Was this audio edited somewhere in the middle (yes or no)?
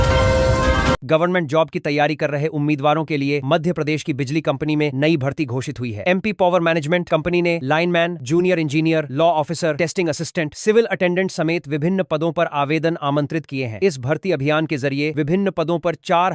yes